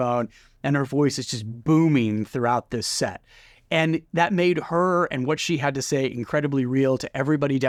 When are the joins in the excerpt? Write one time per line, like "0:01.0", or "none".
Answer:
none